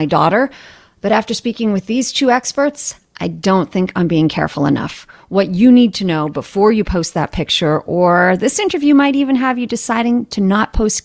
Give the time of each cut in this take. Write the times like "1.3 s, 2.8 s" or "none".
none